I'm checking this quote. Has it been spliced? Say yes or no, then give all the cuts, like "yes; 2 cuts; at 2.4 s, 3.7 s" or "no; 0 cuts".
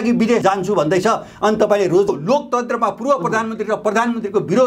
yes; 1 cut; at 2.1 s